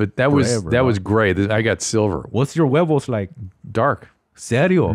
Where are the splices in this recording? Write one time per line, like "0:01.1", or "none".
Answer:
0:02.2